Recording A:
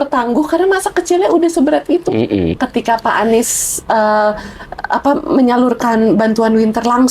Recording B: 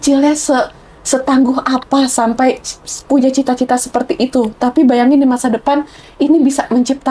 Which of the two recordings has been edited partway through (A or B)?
A